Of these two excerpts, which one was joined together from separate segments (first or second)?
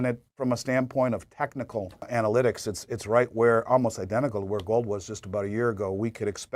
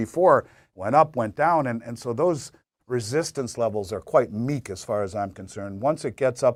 first